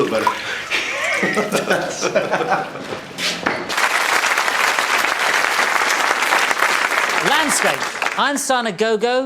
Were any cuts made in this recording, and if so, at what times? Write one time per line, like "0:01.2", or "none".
0:03.8